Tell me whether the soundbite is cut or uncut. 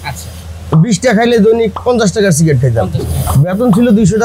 cut